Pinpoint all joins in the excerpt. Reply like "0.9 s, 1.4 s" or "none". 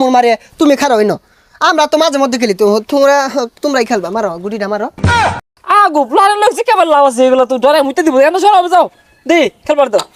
5.2 s

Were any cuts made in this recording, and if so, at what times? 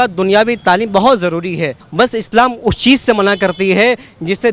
1.8 s

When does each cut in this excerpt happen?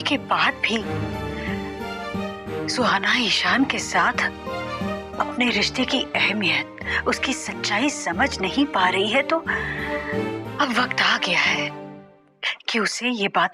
none

